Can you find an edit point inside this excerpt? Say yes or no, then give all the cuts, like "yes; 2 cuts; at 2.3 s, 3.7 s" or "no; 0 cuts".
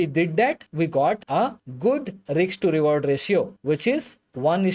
no; 0 cuts